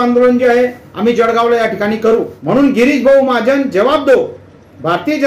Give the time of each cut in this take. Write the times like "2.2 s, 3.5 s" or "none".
2.3 s